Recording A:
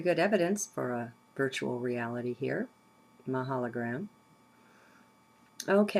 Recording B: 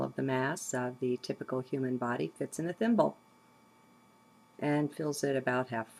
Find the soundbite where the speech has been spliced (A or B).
A